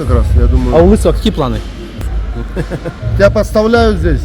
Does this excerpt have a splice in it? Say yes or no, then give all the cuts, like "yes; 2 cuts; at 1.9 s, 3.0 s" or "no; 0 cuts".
yes; 1 cut; at 2.0 s